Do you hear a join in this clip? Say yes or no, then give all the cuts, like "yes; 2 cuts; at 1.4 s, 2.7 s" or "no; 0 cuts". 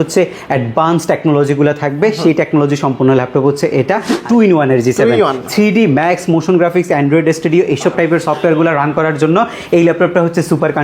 yes; 1 cut; at 4.2 s